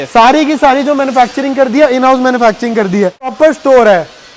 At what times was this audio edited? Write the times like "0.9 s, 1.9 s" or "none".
3.3 s